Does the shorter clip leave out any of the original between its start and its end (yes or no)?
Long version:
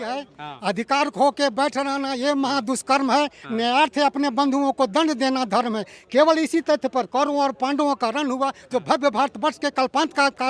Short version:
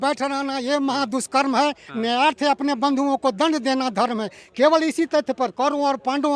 no